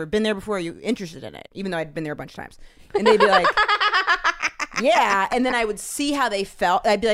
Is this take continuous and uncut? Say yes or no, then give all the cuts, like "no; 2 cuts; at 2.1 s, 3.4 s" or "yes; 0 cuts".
yes; 0 cuts